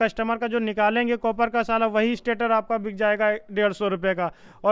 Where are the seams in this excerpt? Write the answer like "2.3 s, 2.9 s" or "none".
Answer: none

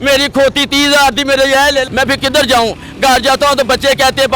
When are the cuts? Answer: 1.9 s

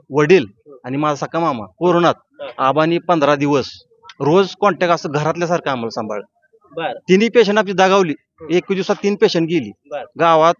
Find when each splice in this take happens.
none

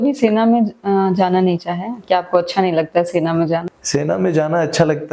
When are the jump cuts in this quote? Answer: 3.8 s

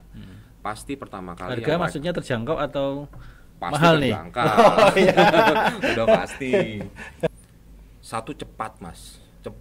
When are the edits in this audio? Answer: 7.3 s

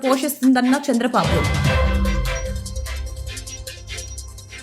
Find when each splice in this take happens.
1.2 s, 2.5 s

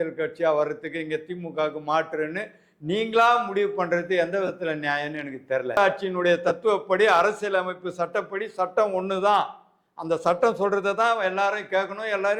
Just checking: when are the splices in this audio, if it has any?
5.8 s

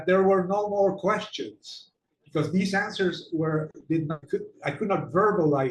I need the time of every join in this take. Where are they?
4.2 s

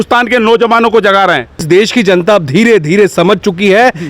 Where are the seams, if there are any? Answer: 1.6 s

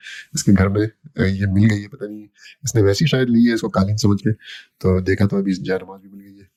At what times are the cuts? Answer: none

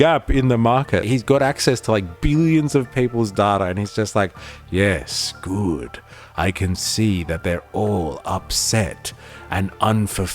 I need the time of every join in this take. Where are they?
1.1 s

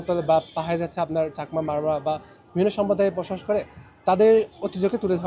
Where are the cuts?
none

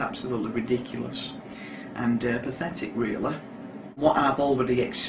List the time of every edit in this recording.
4.0 s

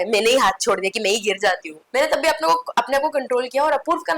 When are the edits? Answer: 1.8 s

